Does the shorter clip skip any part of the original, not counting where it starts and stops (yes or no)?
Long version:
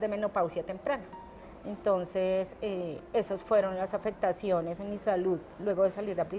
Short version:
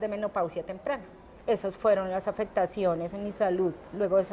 yes